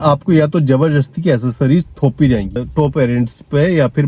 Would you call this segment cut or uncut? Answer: cut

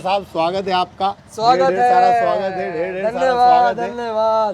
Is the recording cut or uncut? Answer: cut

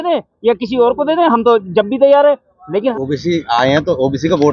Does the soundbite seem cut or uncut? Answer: cut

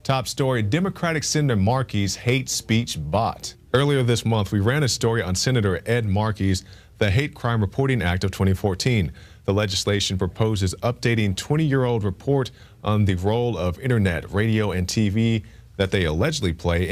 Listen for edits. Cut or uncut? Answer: uncut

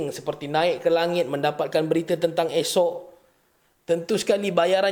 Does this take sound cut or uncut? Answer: uncut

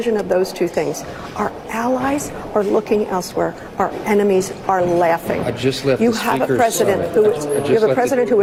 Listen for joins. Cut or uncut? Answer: uncut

